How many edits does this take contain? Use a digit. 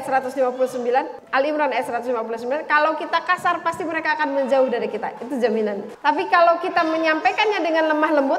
2